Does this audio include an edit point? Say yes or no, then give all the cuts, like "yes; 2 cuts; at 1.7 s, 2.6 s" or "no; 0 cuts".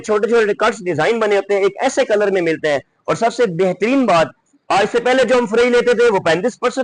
no; 0 cuts